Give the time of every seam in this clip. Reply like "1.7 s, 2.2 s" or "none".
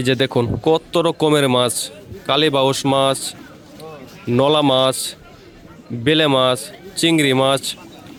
none